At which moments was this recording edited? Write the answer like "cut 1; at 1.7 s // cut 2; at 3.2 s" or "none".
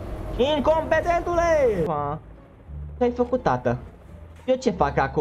cut 1; at 1.9 s